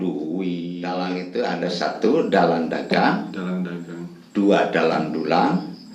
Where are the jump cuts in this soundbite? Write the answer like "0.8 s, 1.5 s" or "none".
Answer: 0.9 s